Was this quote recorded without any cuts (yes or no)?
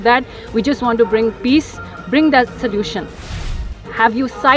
no